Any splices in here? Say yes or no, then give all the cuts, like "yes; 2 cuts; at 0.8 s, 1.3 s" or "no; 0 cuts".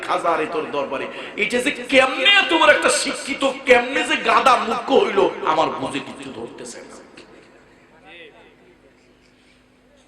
no; 0 cuts